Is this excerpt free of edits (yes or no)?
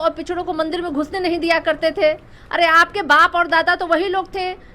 yes